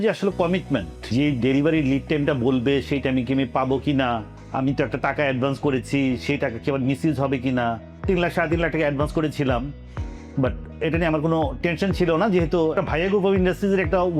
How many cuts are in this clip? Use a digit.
3